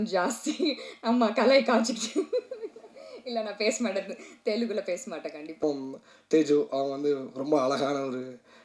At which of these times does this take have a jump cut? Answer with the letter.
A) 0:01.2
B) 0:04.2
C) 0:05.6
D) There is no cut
C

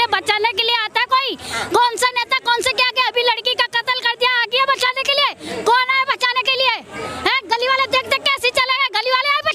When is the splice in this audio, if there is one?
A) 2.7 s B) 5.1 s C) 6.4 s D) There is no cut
D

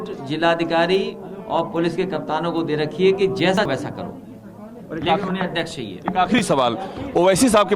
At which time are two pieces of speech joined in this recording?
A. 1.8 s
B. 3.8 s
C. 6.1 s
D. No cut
B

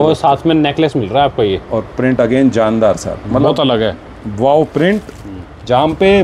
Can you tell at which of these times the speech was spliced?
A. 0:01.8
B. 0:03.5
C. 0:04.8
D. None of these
D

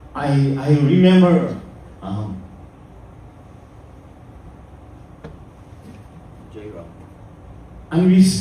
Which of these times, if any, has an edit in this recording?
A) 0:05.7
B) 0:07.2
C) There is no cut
B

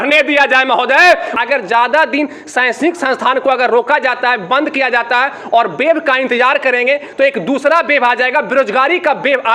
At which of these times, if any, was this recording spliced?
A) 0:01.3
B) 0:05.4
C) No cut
A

